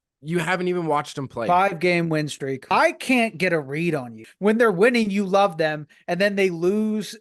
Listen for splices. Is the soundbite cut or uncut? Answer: cut